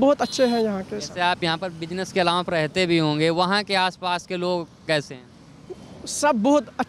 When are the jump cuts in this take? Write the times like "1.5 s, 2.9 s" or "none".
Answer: none